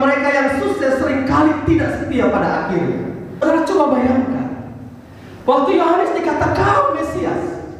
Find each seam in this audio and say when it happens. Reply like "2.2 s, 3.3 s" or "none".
3.4 s